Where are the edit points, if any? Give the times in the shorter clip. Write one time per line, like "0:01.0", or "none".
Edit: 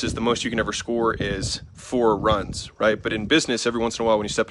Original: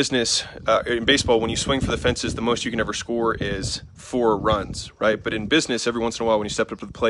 none